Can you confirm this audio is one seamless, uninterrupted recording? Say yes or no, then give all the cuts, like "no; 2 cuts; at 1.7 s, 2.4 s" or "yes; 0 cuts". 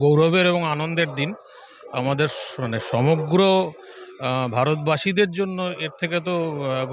yes; 0 cuts